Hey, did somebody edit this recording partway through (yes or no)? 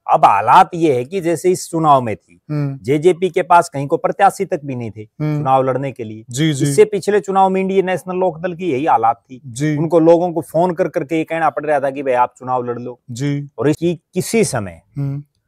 yes